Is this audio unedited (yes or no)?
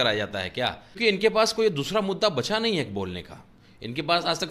no